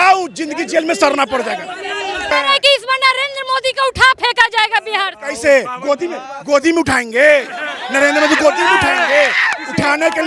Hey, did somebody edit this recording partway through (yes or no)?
yes